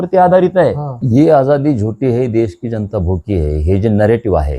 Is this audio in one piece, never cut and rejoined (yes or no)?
no